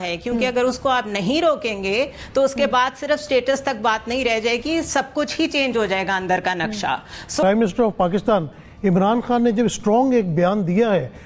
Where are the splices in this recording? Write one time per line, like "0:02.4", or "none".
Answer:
0:07.4

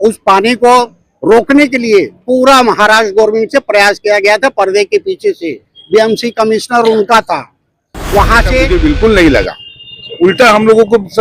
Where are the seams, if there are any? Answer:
0:08.7

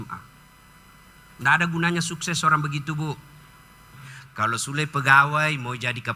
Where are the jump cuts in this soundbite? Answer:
0:04.0

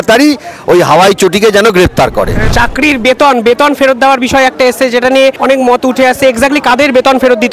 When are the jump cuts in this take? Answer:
0:02.5
0:05.4

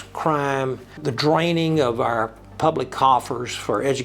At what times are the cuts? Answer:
0:01.0

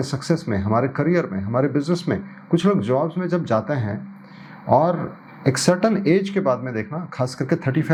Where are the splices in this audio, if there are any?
none

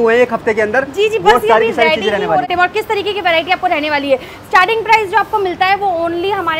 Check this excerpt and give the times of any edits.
0:02.4

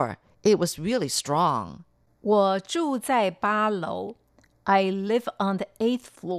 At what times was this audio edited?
none

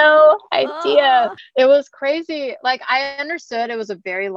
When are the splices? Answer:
0:01.4

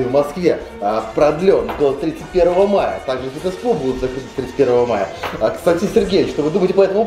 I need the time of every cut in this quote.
none

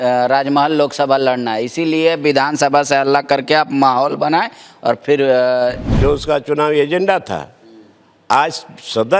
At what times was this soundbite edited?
0:05.9

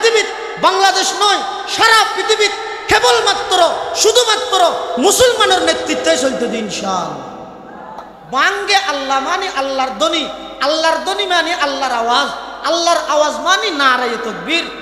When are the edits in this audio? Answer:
0:08.2

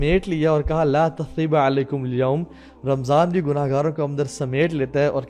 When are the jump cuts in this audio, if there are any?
none

